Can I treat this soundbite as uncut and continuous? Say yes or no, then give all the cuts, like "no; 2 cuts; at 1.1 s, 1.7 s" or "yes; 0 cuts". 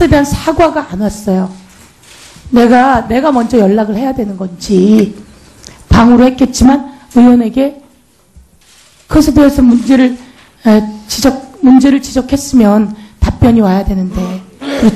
no; 1 cut; at 13.9 s